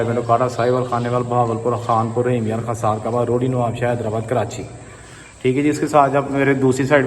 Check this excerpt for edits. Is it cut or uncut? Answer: uncut